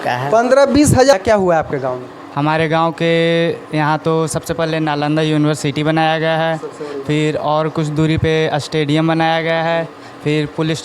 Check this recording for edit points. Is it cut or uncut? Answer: cut